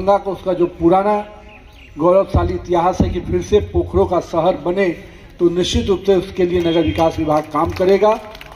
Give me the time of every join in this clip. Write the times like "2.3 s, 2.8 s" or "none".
none